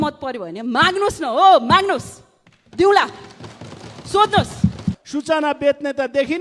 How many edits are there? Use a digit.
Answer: 1